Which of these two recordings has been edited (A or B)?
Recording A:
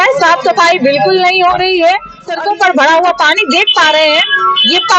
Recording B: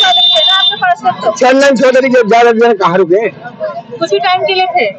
A